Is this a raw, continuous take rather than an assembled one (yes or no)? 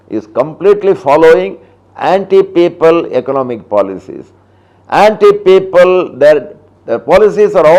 yes